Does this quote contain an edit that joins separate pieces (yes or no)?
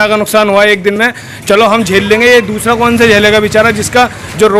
no